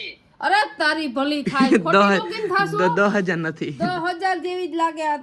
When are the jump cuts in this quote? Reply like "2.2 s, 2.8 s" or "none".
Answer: none